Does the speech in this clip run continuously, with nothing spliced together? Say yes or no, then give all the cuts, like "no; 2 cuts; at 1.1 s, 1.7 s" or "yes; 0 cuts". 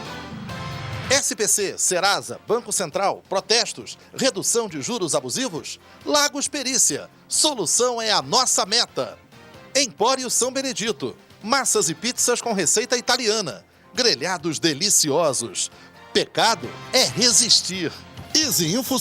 no; 1 cut; at 1.0 s